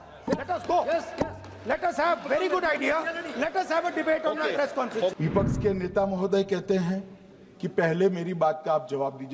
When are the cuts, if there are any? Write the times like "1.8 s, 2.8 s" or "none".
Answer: 5.1 s